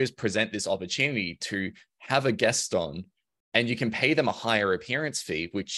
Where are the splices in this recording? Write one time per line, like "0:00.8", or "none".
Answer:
none